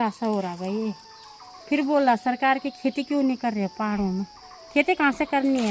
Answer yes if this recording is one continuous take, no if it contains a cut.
yes